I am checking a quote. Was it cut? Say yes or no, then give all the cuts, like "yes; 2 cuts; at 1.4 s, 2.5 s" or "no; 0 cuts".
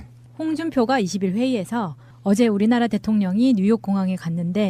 yes; 1 cut; at 3.4 s